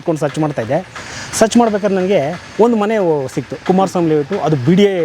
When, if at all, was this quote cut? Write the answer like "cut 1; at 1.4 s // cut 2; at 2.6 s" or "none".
none